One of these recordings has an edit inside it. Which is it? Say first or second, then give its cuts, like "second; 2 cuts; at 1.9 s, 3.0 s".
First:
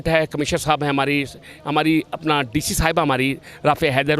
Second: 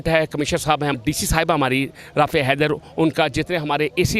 second; 1 cut; at 0.9 s